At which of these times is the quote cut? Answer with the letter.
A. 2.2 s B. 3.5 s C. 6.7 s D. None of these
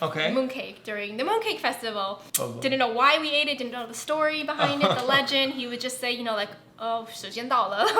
A